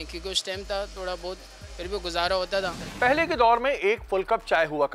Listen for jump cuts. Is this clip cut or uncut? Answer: uncut